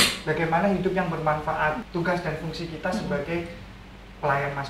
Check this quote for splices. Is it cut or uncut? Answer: cut